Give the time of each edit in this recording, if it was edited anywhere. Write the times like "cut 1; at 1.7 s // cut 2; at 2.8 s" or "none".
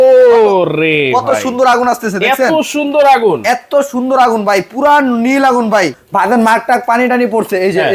cut 1; at 6.0 s

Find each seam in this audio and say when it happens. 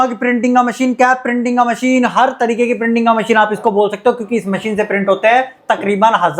none

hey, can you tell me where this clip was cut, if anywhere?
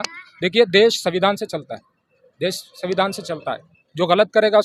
none

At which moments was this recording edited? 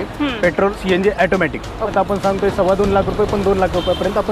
cut 1; at 0.8 s // cut 2; at 1.9 s

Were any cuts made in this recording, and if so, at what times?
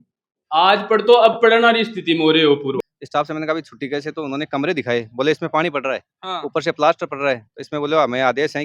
cut 1; at 2.8 s

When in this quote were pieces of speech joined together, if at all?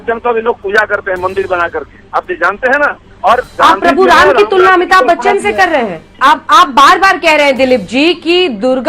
cut 1; at 3.1 s // cut 2; at 6.0 s

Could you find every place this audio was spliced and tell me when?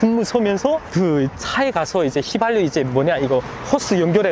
none

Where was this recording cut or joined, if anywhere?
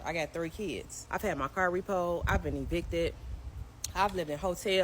cut 1; at 0.9 s

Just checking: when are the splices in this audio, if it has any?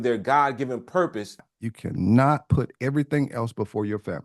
cut 1; at 1.5 s

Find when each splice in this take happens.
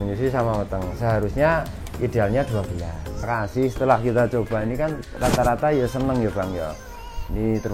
cut 1; at 3.3 s

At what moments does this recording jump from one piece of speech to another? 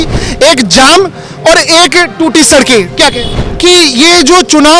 cut 1; at 3.5 s

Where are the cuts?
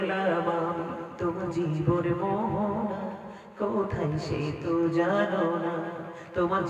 cut 1; at 1.1 s

